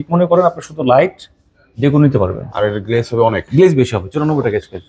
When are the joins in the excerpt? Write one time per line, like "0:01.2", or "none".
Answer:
none